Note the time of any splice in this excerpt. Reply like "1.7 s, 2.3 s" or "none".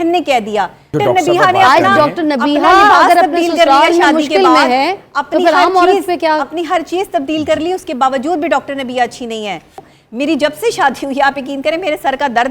0.9 s, 9.9 s

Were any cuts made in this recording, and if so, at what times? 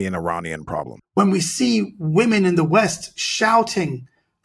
1.0 s

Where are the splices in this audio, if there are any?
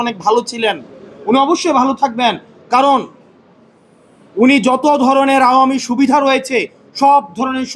none

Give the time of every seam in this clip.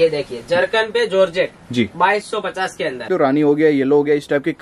3.0 s

